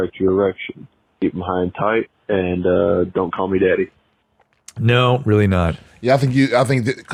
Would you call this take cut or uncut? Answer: uncut